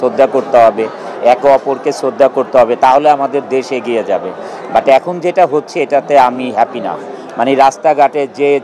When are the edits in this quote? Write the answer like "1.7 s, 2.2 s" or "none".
none